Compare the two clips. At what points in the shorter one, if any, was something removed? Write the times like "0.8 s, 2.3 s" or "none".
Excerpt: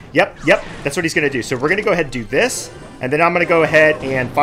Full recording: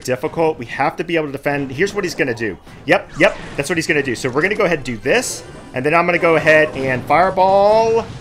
none